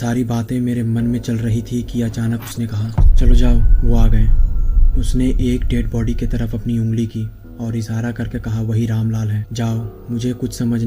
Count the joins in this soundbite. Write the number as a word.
zero